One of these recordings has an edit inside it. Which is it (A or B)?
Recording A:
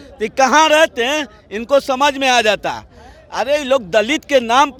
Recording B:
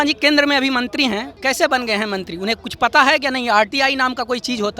B